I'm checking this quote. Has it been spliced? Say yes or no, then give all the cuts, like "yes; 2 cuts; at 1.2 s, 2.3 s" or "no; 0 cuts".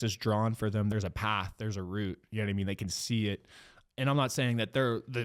yes; 2 cuts; at 0.9 s, 3.8 s